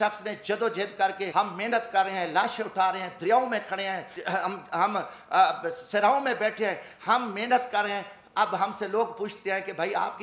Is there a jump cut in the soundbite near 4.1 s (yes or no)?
yes